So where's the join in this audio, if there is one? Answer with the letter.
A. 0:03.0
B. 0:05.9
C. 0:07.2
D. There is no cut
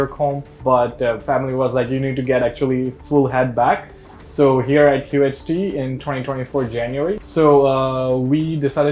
C